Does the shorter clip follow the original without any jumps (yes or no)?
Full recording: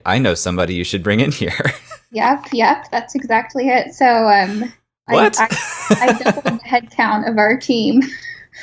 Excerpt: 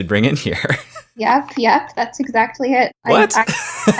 no